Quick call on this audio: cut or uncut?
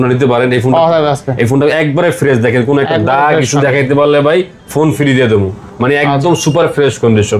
uncut